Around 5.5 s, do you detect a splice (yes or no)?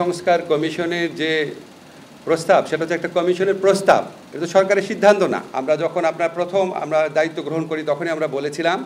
yes